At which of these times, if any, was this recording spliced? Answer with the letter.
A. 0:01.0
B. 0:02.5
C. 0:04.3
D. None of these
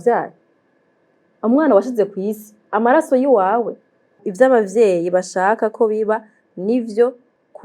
C